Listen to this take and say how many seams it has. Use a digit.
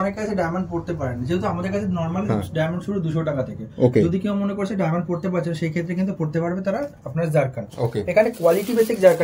0